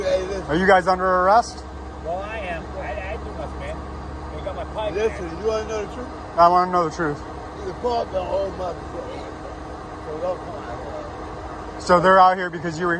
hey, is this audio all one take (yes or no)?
yes